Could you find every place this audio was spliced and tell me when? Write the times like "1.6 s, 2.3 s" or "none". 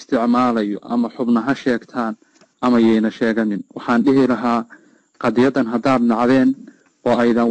none